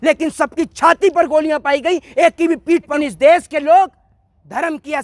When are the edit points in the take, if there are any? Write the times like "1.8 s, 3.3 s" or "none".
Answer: 3.0 s